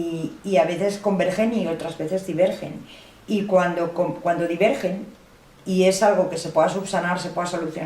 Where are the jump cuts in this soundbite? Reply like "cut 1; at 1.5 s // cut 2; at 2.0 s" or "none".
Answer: none